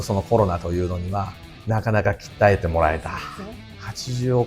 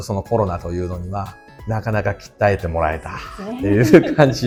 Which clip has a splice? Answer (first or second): first